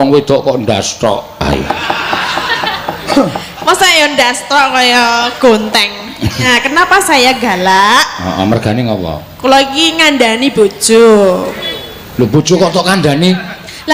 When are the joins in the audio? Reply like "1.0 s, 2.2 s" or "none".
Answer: 6.5 s